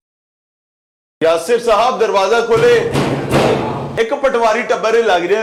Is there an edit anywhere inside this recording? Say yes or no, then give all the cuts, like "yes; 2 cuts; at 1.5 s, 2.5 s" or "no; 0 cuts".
no; 0 cuts